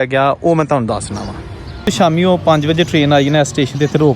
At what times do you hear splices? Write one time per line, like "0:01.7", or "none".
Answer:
0:01.9